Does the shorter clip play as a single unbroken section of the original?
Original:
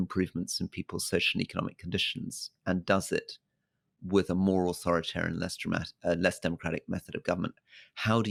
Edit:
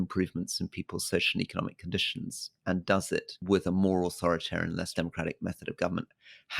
no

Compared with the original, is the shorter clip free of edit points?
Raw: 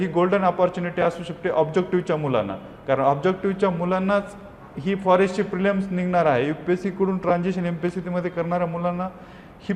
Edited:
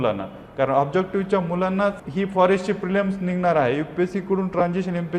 no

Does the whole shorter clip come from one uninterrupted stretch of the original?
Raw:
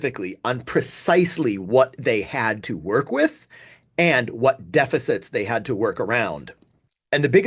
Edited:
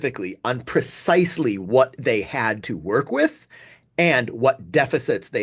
yes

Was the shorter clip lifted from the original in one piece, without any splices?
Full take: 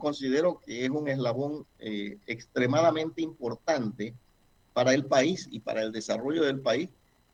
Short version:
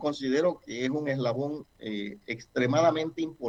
yes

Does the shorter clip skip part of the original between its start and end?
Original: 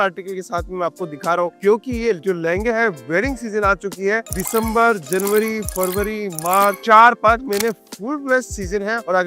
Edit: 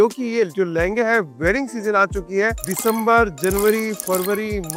no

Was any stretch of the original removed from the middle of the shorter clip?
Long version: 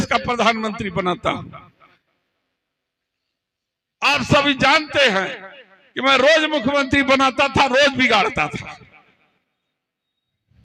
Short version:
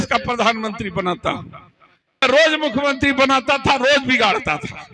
yes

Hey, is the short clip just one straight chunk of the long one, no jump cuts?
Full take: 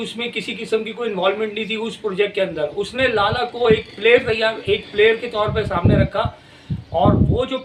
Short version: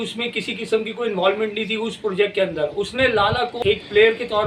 no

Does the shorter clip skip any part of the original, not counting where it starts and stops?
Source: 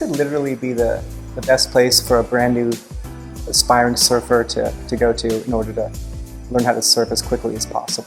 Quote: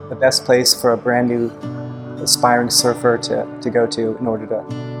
no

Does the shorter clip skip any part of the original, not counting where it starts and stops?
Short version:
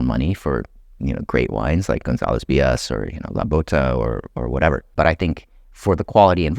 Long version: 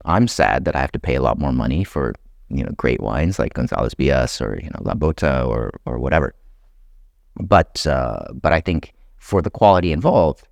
yes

